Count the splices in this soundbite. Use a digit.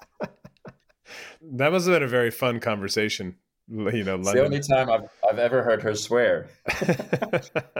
1